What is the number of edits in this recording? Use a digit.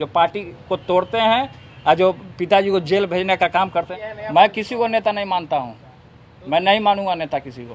1